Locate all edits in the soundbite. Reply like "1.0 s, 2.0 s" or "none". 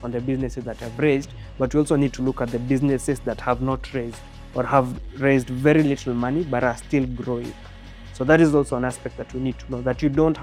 none